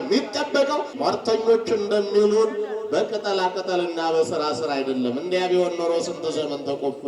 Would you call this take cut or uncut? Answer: cut